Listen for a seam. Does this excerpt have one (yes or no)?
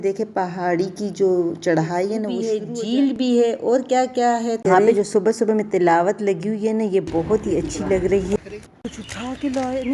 yes